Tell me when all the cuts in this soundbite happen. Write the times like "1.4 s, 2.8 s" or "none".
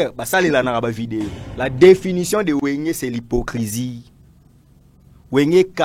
1.4 s